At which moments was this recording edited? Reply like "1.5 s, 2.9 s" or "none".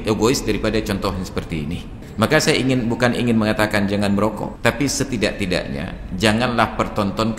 2.0 s, 4.5 s